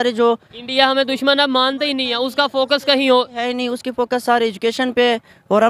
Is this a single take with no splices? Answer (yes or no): yes